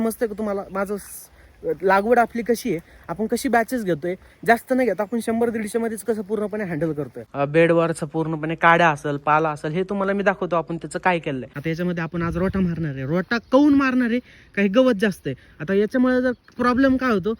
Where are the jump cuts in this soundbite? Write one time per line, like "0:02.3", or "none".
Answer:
0:07.2
0:11.5